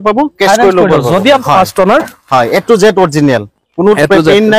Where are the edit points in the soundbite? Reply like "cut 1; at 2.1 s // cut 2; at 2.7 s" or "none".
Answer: cut 1; at 1.4 s